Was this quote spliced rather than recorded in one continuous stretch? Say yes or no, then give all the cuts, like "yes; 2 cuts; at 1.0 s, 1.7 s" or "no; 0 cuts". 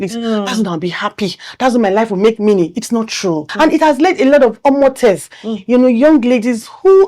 yes; 1 cut; at 3.5 s